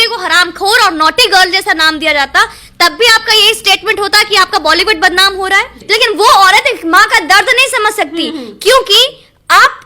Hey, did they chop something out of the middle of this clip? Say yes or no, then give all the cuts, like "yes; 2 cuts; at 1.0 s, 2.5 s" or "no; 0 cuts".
yes; 1 cut; at 5.8 s